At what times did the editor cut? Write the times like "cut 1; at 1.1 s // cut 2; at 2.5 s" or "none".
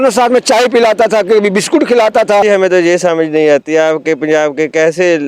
cut 1; at 2.4 s